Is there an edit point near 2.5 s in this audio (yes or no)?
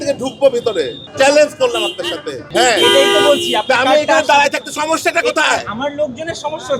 yes